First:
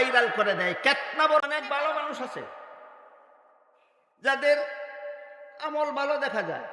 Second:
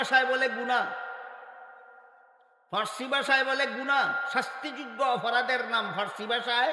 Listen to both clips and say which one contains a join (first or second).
first